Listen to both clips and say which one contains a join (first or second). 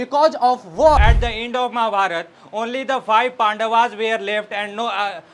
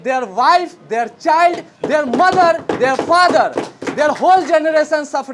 first